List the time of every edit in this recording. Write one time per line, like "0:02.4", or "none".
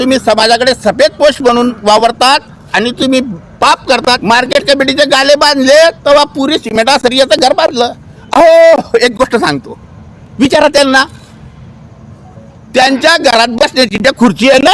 0:04.2